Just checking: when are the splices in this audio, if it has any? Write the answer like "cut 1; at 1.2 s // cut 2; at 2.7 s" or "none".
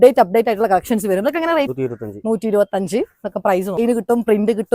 cut 1; at 1.7 s // cut 2; at 3.8 s